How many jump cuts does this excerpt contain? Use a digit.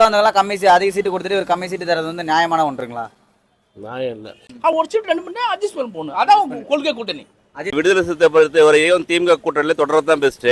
2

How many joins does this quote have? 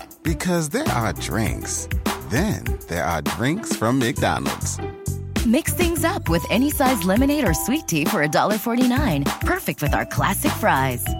0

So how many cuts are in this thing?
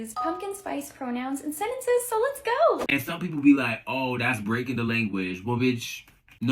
1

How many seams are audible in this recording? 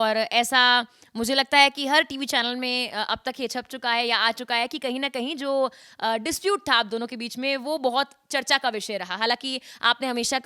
0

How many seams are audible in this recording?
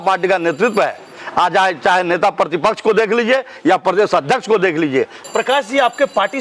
1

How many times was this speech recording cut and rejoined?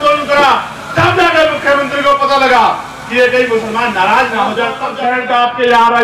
1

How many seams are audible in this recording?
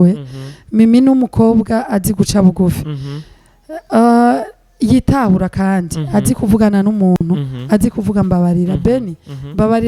0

